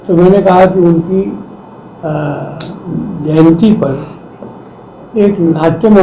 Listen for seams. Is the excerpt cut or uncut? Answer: cut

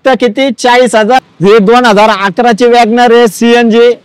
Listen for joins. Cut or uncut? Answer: cut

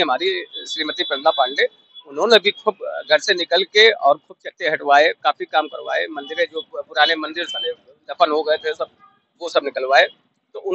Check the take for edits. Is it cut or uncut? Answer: uncut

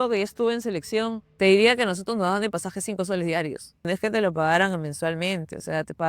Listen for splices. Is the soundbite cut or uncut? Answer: cut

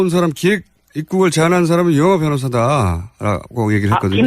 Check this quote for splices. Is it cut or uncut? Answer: cut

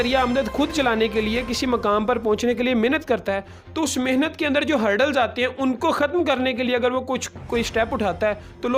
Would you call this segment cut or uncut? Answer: uncut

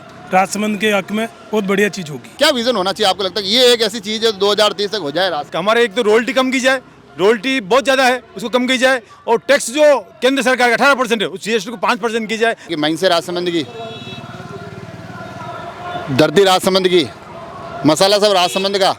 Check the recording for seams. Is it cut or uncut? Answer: cut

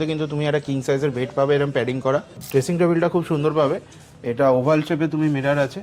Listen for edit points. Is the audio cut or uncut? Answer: cut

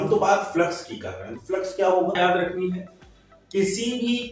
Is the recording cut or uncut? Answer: cut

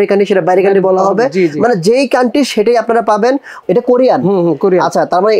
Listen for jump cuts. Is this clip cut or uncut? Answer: cut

